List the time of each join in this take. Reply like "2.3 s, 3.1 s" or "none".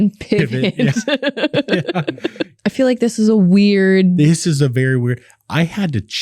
2.5 s